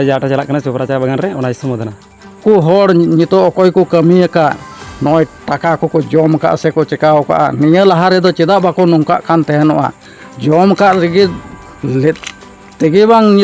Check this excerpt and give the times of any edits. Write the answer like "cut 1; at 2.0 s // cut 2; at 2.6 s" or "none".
cut 1; at 2.4 s